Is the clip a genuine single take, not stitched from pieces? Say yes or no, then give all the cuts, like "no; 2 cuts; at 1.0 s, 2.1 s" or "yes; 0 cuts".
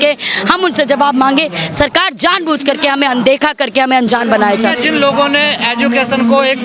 yes; 0 cuts